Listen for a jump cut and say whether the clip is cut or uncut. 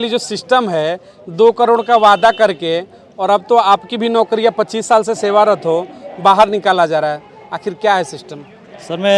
uncut